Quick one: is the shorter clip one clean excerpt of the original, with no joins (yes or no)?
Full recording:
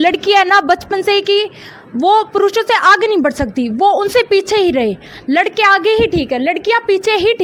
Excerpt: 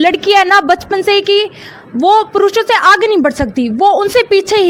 yes